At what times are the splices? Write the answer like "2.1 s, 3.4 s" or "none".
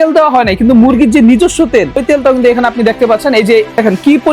2.0 s